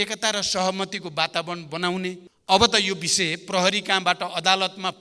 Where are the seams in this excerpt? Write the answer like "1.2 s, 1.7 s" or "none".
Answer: 2.3 s

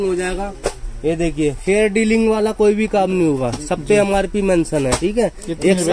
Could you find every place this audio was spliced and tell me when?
none

